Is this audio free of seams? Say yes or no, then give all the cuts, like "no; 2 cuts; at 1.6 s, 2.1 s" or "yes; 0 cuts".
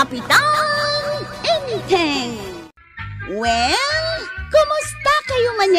no; 1 cut; at 2.5 s